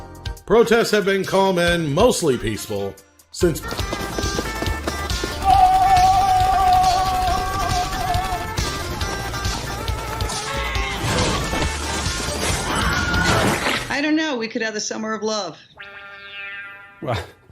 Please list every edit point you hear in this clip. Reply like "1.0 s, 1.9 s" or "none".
3.6 s